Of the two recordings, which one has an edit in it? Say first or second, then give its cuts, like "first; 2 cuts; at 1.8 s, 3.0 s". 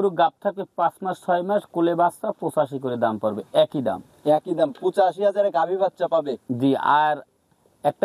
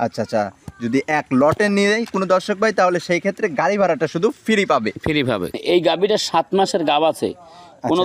second; 1 cut; at 5.6 s